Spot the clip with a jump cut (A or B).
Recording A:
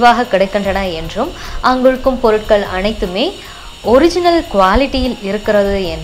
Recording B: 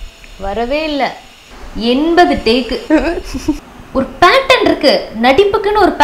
B